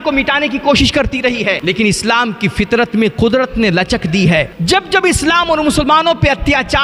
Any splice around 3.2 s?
no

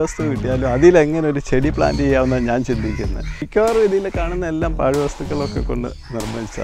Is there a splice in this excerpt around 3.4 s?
yes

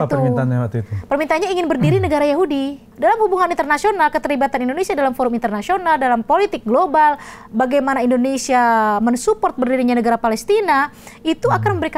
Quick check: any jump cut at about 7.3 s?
no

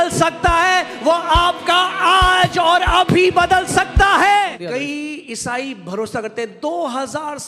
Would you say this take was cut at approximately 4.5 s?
yes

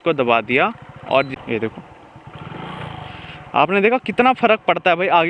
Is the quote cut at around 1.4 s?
yes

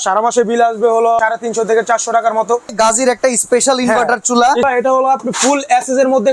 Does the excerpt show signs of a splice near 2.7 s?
yes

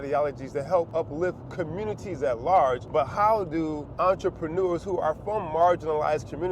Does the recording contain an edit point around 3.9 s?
yes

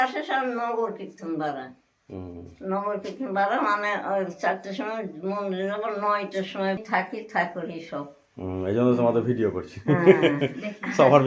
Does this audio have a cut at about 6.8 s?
yes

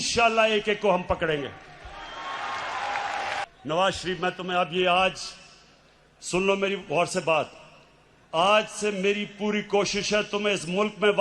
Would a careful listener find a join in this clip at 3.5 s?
yes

